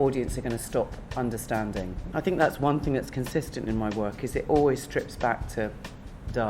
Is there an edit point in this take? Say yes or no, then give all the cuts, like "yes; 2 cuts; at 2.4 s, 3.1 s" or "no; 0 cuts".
yes; 1 cut; at 2.1 s